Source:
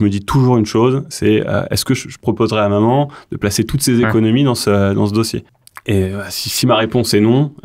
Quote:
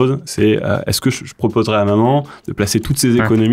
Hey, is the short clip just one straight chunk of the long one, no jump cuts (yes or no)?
yes